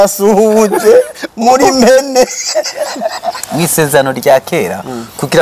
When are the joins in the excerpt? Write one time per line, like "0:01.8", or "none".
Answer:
0:03.4